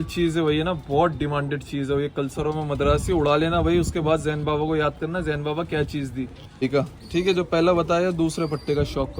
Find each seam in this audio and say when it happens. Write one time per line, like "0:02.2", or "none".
0:06.6